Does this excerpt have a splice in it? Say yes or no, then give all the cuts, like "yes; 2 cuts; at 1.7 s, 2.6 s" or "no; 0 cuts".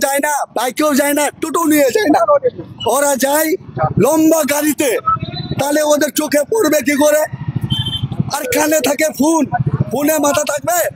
no; 0 cuts